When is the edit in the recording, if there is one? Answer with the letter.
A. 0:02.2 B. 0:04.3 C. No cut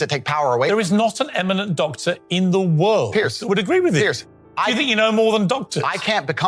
C